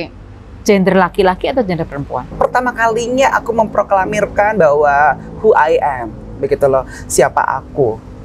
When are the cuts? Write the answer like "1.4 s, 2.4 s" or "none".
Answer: 2.3 s